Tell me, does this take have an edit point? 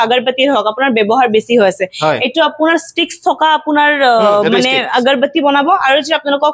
no; 0 cuts

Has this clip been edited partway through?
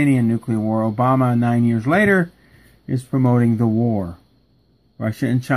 yes; 1 cut; at 2.6 s

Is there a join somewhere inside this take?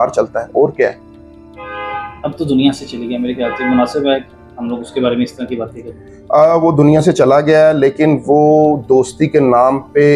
no; 0 cuts

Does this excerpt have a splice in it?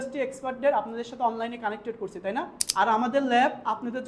yes; 1 cut; at 2.6 s

